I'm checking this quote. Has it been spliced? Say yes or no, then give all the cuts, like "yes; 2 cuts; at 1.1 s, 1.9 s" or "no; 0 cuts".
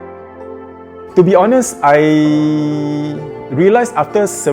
yes; 1 cut; at 1.1 s